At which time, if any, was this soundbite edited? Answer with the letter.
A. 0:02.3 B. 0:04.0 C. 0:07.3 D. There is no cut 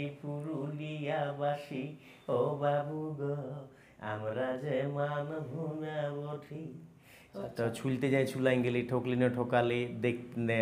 C